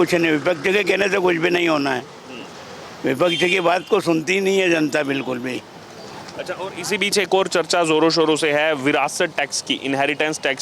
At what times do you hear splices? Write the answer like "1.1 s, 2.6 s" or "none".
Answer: none